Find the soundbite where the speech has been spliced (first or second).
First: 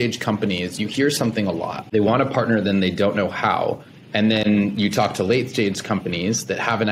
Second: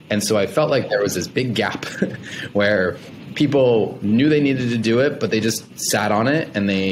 first